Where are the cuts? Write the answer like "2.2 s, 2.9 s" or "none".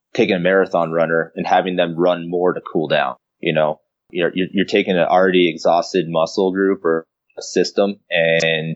3.3 s